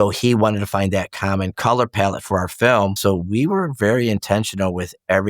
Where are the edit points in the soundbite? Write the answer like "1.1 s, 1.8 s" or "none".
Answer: 1.5 s, 3.0 s